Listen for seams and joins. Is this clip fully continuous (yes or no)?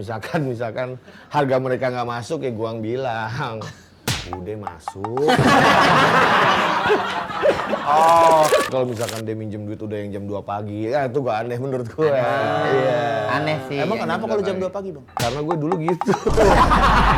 no